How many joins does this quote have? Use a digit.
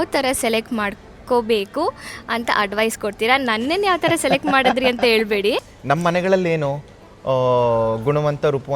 1